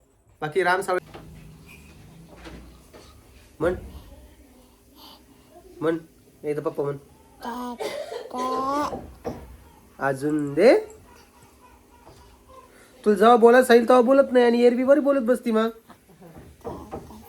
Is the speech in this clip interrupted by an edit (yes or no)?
yes